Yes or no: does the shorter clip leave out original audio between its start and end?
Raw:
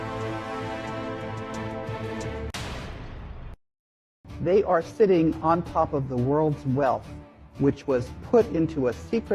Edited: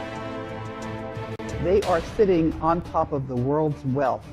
yes